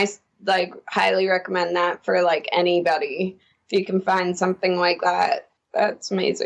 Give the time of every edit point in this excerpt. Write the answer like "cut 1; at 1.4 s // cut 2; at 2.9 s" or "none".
cut 1; at 5.6 s